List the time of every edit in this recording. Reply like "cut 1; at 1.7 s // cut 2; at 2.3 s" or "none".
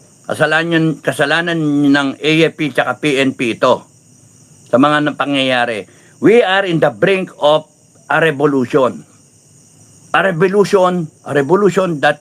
none